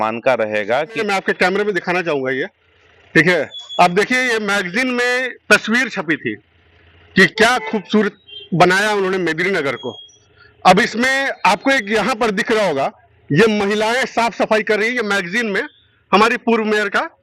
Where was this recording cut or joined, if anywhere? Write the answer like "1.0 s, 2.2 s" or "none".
1.0 s